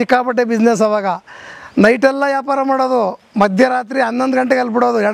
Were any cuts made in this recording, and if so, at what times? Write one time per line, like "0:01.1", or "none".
none